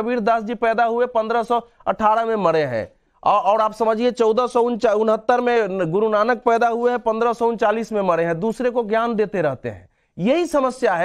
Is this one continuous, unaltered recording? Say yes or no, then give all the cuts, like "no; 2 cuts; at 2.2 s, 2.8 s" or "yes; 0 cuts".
yes; 0 cuts